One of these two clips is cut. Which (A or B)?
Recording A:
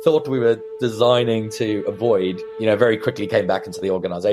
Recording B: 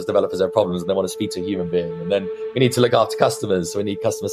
A